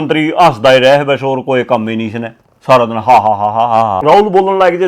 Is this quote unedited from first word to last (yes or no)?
no